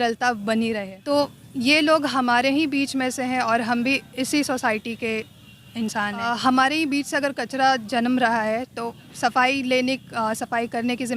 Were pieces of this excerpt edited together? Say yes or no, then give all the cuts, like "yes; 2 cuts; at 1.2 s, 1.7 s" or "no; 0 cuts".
yes; 2 cuts; at 0.9 s, 6.3 s